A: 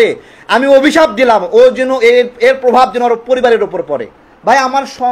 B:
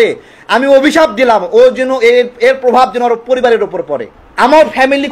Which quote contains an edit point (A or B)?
A